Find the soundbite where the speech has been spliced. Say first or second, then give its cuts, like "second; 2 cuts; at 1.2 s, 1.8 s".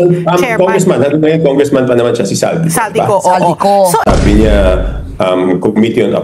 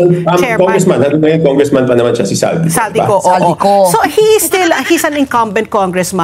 first; 1 cut; at 4.0 s